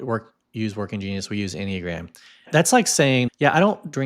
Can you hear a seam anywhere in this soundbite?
yes; 2 cuts; at 2.5 s, 3.3 s

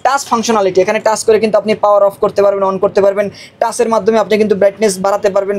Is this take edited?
no; 0 cuts

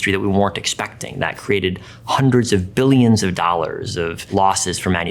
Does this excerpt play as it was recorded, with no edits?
no; 1 cut; at 4.2 s

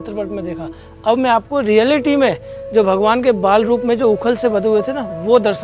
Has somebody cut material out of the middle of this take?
no; 0 cuts

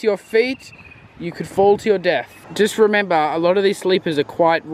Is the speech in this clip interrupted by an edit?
yes; 1 cut; at 2.4 s

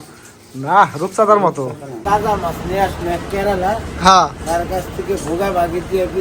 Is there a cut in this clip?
yes; 1 cut; at 1.9 s

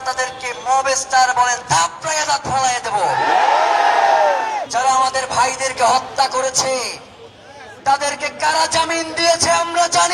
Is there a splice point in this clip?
yes; 1 cut; at 4.7 s

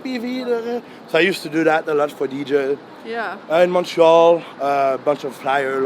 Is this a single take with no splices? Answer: yes; 0 cuts

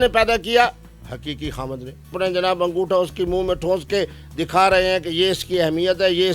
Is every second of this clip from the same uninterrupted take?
no; 1 cut; at 2.1 s

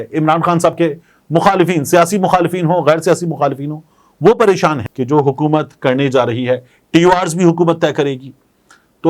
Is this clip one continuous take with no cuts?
no; 1 cut; at 4.9 s

